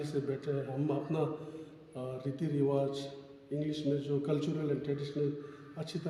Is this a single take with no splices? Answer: yes; 0 cuts

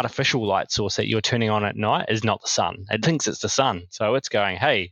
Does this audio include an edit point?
no; 0 cuts

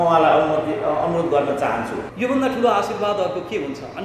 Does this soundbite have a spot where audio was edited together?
yes; 1 cut; at 2.0 s

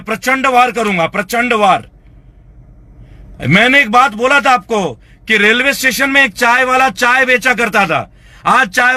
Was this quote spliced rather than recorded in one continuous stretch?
no; 0 cuts

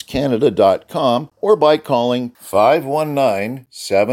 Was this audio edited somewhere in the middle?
yes; 1 cut; at 1.3 s

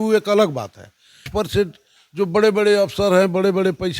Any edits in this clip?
yes; 1 cut; at 1.2 s

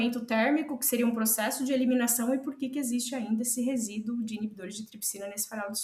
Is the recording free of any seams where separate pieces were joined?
yes; 0 cuts

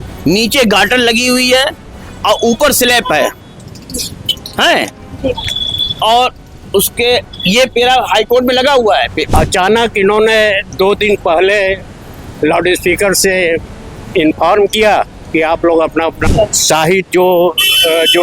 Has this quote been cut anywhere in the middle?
yes; 2 cuts; at 9.2 s, 16.2 s

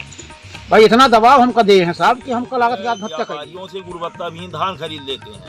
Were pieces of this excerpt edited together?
yes; 1 cut; at 3.4 s

